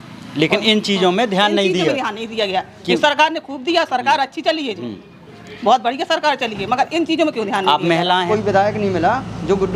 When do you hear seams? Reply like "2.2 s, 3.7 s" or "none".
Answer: 8.3 s